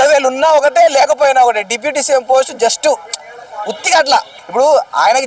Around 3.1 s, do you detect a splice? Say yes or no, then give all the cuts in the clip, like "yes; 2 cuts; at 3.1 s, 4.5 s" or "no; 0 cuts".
no; 1 cut; at 4.4 s